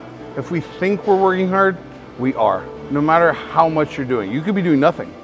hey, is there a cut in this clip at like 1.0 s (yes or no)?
no